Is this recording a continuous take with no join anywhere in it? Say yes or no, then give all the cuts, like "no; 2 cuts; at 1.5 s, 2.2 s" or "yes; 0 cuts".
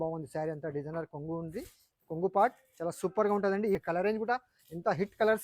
no; 1 cut; at 3.8 s